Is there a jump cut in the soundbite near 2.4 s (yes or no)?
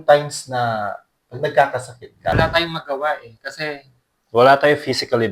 yes